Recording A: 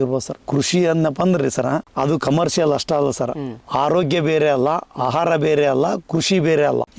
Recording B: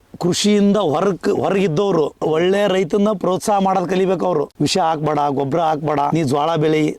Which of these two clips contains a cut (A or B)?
B